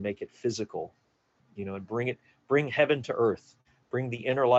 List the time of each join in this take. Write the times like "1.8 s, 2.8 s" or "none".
none